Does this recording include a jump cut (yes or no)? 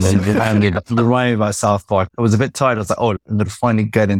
yes